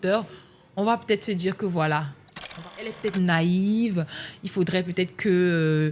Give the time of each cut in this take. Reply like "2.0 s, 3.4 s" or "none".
2.5 s